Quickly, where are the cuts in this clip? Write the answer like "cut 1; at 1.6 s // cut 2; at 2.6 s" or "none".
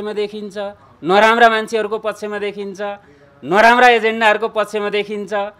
none